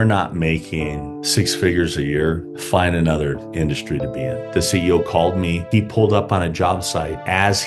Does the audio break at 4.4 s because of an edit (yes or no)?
yes